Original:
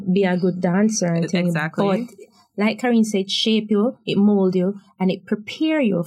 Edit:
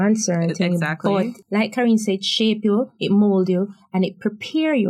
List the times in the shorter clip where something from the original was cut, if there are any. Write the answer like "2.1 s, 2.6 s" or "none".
1.4 s